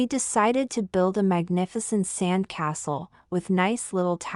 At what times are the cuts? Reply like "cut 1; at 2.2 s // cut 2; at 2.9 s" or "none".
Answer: cut 1; at 3.1 s